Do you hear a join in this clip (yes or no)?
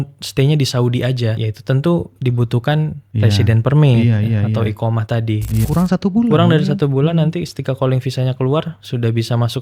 yes